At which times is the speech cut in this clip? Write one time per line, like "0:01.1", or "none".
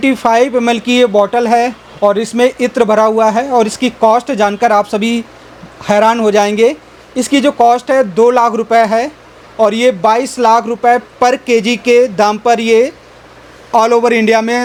none